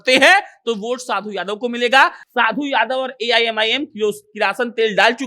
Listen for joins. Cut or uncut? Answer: cut